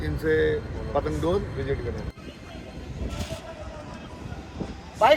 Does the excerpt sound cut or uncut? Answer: cut